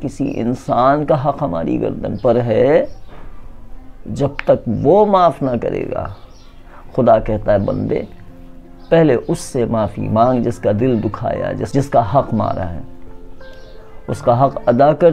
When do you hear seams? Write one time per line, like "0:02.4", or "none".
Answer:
0:11.6